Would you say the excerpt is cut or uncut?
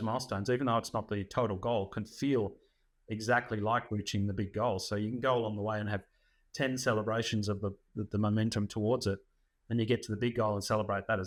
uncut